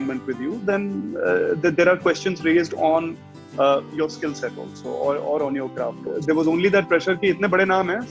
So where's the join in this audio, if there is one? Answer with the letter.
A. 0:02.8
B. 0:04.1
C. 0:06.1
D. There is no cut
C